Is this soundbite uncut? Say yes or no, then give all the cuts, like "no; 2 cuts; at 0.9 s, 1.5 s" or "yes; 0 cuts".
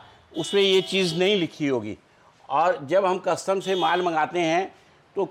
yes; 0 cuts